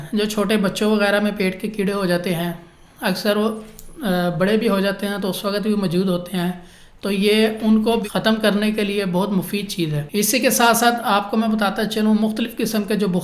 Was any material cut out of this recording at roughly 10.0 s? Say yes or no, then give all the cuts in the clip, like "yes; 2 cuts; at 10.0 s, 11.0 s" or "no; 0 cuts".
yes; 2 cuts; at 8.0 s, 10.0 s